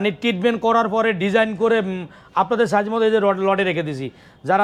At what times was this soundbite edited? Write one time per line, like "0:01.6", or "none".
none